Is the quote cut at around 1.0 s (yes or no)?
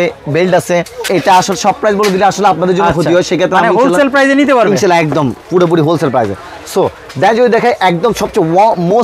no